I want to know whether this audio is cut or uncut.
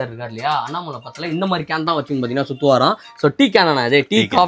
uncut